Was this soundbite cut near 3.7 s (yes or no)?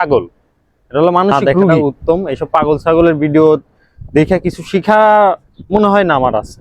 no